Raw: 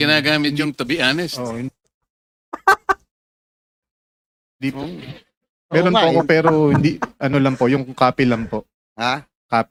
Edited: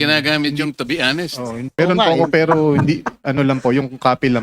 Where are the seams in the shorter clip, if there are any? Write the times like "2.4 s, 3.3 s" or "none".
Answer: 1.7 s